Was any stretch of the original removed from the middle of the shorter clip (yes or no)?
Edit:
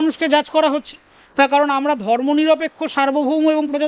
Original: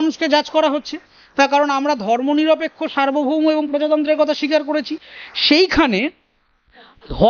no